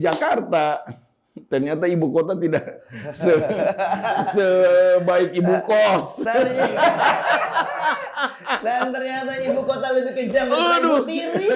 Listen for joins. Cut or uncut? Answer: uncut